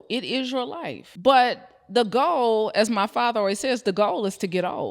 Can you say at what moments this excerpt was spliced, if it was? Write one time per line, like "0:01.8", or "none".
0:01.0